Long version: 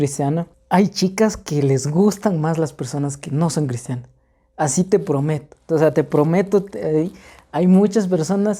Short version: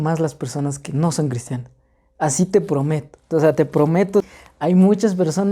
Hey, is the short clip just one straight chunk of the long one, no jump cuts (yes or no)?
no